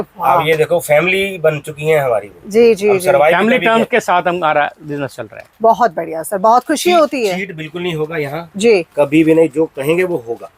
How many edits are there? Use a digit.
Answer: 0